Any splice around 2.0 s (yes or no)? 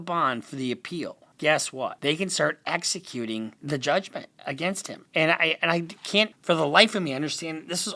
yes